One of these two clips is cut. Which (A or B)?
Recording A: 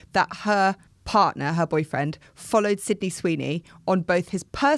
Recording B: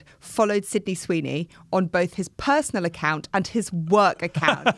A